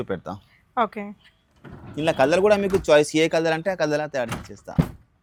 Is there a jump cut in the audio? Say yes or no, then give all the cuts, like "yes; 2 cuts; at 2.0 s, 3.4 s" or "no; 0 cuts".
no; 0 cuts